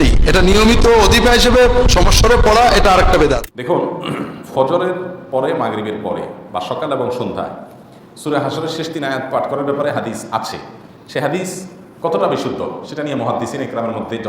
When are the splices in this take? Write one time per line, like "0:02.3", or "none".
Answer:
0:03.5